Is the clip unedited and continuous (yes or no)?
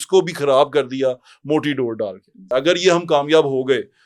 no